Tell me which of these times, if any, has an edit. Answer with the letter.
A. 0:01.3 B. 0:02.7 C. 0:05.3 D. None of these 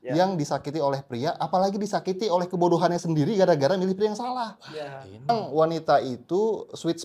C